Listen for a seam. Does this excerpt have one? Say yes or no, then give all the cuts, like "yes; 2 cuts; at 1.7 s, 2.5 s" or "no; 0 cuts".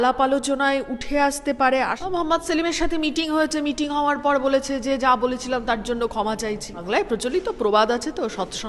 yes; 2 cuts; at 2.0 s, 6.8 s